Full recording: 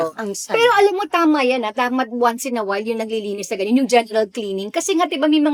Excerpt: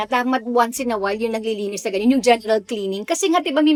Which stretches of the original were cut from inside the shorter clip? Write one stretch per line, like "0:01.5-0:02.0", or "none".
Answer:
none